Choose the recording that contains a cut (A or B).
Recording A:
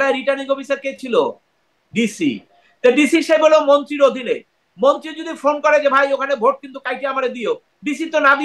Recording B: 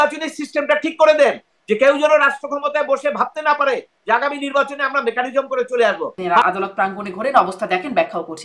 B